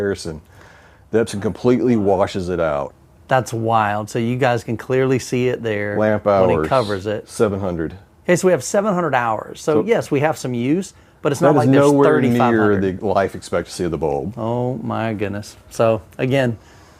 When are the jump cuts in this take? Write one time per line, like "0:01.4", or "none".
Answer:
0:02.9